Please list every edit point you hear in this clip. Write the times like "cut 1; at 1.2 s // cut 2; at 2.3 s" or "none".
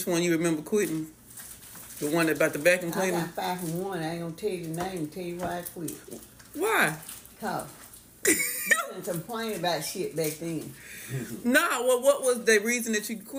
none

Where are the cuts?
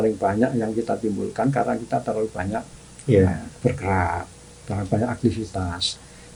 none

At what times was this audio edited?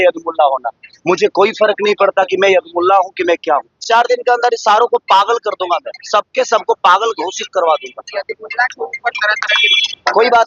cut 1; at 3.8 s

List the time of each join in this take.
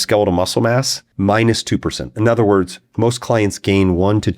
cut 1; at 1.0 s // cut 2; at 2.8 s

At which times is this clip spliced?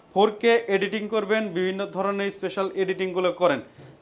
none

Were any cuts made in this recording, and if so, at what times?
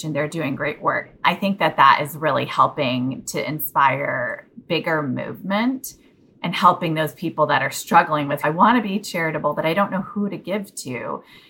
cut 1; at 1.0 s // cut 2; at 8.4 s

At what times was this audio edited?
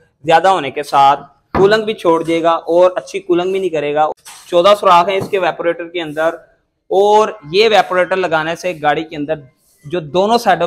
cut 1; at 4.1 s

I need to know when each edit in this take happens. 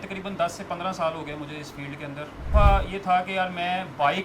cut 1; at 2.5 s

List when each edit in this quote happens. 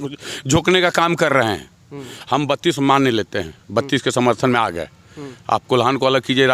none

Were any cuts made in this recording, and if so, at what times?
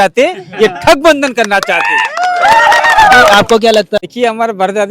cut 1; at 4.0 s

